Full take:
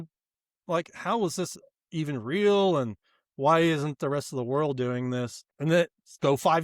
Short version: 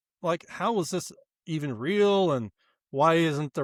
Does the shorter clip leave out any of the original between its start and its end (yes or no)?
no